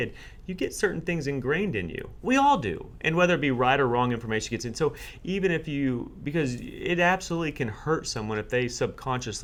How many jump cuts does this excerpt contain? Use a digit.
0